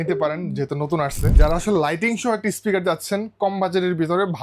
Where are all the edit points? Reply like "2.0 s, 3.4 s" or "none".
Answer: 1.4 s